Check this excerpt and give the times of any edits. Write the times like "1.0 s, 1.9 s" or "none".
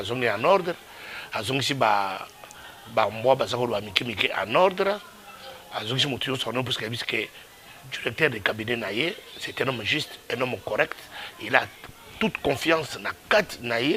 none